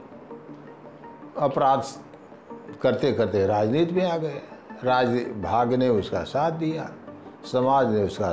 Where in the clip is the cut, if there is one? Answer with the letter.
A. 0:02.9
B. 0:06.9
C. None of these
C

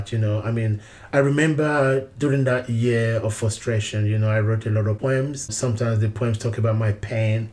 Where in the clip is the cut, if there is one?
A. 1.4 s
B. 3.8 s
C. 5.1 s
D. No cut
C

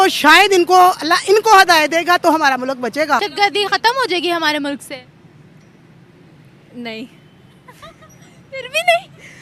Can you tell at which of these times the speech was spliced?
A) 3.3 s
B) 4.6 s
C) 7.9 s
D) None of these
A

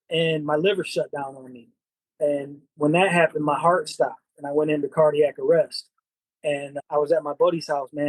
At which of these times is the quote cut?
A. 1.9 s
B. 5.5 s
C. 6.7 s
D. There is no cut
C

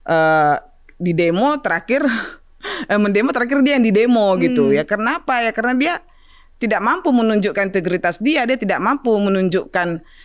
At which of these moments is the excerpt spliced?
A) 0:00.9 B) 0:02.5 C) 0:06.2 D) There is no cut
D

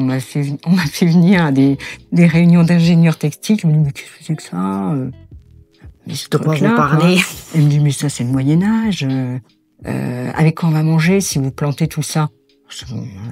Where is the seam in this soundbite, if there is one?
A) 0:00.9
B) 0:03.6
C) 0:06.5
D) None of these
D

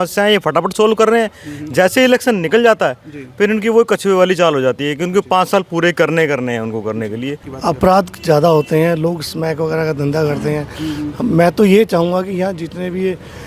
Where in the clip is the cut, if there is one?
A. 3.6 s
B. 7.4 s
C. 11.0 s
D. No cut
B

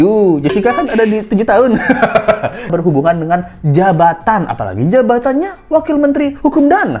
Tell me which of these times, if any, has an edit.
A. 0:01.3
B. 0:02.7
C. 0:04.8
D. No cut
B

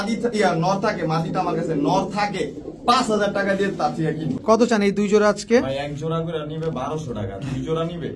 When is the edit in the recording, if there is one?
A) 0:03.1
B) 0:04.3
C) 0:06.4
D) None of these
B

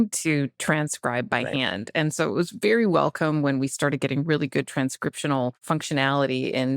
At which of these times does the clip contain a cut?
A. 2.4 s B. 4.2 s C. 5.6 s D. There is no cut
C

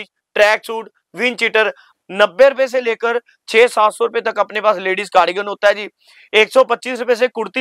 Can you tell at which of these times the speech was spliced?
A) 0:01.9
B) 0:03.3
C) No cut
A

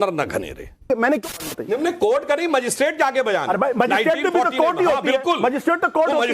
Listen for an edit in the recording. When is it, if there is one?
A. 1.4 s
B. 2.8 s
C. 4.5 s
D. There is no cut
A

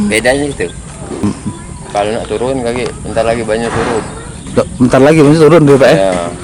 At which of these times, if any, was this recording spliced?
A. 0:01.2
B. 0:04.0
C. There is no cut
A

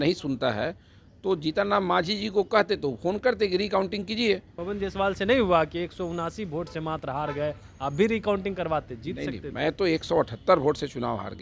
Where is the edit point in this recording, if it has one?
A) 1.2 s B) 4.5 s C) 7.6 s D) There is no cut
B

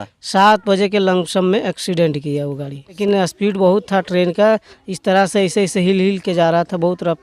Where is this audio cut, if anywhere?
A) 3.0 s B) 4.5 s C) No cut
A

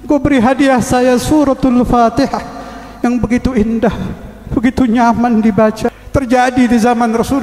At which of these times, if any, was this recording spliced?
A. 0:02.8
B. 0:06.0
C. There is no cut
B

